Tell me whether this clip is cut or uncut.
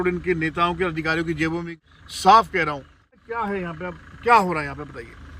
cut